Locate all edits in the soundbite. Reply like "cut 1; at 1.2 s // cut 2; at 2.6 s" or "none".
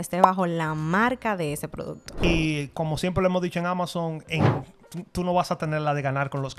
cut 1; at 2.2 s